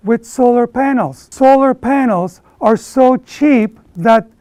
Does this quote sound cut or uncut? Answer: uncut